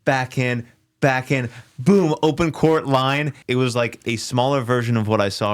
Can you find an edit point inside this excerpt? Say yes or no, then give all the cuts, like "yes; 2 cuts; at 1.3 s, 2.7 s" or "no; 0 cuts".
yes; 1 cut; at 3.4 s